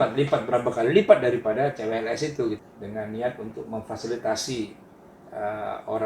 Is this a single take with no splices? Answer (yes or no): no